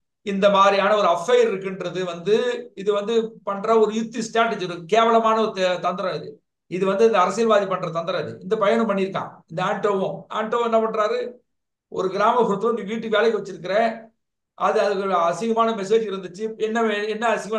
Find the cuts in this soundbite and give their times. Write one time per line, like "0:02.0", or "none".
none